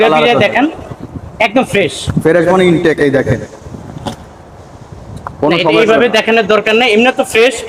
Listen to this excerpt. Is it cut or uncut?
uncut